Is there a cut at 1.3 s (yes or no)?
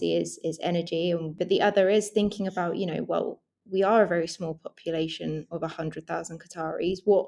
yes